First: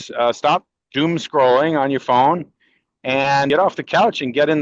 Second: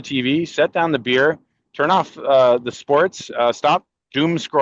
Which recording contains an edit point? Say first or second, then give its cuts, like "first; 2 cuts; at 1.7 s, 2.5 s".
first; 1 cut; at 3.5 s